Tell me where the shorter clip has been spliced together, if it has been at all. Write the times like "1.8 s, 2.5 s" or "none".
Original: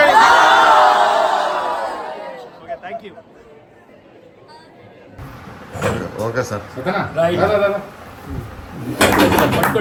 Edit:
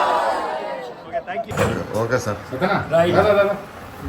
1.5 s

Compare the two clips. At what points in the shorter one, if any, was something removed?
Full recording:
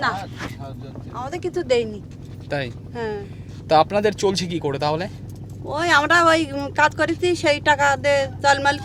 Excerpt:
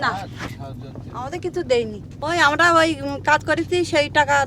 2.1 s

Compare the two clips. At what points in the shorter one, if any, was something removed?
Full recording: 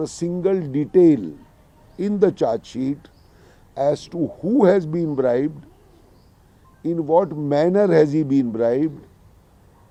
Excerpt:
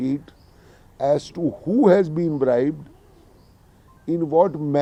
none

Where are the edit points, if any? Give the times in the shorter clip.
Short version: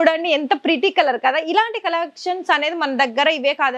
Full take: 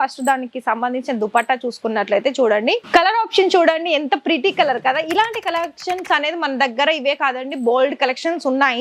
none

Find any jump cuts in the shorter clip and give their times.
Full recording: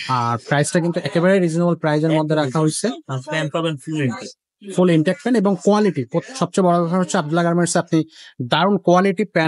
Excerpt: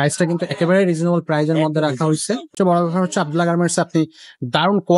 2.5 s

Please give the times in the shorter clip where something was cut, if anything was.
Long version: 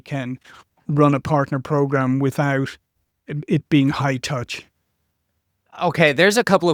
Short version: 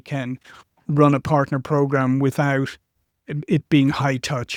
none

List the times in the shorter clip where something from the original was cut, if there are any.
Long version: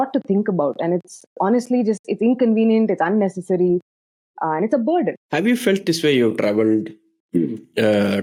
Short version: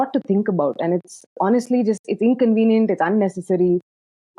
none

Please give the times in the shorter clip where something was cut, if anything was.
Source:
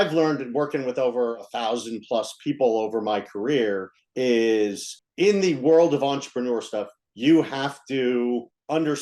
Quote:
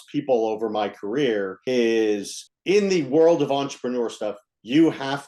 1.6 s

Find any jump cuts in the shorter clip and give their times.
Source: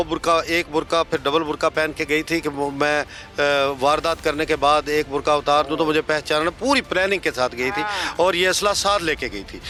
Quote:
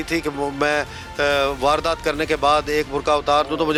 none

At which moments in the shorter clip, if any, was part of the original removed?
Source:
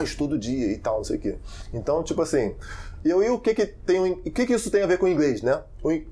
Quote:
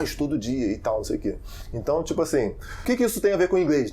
2.8 s

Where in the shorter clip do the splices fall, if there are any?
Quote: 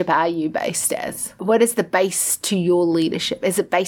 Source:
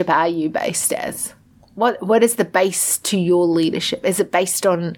1.4 s

